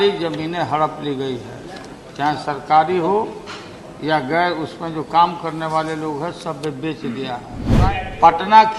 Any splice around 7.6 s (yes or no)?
yes